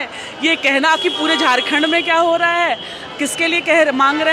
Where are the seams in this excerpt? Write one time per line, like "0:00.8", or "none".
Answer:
none